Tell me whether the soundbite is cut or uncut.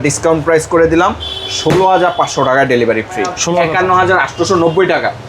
cut